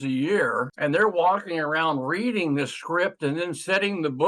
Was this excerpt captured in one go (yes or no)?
yes